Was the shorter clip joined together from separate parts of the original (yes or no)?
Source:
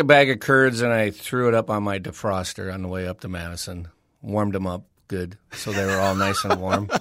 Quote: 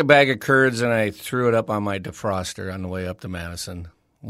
no